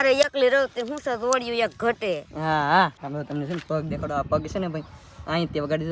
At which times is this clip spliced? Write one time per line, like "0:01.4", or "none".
0:03.0